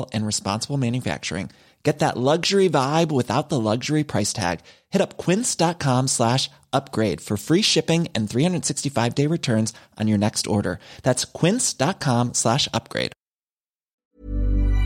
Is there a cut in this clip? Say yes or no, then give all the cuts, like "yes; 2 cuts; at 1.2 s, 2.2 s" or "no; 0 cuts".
yes; 1 cut; at 13.9 s